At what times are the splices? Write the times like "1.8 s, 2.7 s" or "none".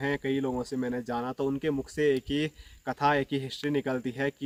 none